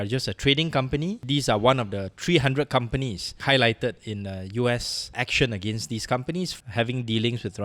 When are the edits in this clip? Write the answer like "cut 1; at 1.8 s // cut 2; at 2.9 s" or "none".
cut 1; at 3.3 s // cut 2; at 5.0 s // cut 3; at 6.5 s